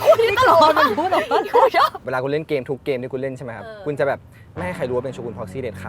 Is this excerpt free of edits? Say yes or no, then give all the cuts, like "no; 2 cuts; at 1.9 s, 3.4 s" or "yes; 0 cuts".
yes; 0 cuts